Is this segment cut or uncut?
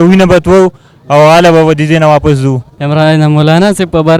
cut